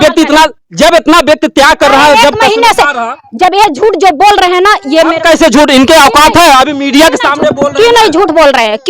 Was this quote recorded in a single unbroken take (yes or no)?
no